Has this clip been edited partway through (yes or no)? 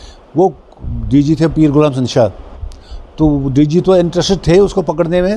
no